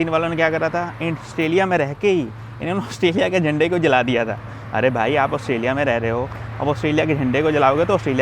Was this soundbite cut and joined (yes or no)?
no